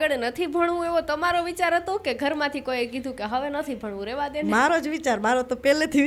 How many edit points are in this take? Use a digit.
0